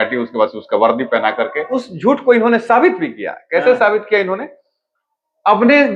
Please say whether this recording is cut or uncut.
cut